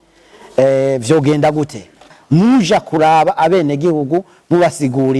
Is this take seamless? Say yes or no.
no